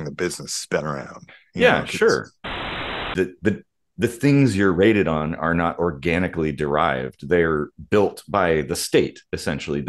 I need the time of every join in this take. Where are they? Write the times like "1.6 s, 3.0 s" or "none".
2.6 s